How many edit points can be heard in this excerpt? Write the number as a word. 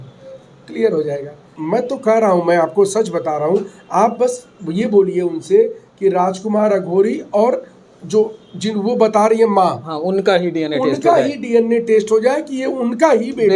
one